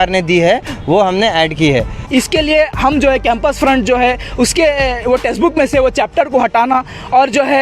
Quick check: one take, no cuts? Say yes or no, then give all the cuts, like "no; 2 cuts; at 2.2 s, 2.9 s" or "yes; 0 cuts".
no; 1 cut; at 2.0 s